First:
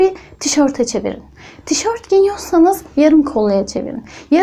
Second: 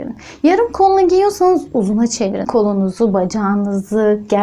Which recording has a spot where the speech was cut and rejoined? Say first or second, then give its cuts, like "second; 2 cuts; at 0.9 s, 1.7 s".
second; 1 cut; at 2.5 s